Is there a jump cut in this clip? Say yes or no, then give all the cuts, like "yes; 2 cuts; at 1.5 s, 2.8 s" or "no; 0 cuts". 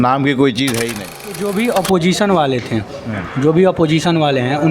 yes; 1 cut; at 1.6 s